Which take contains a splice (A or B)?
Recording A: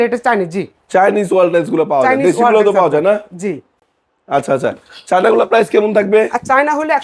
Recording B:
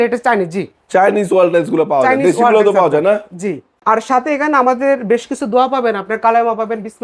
B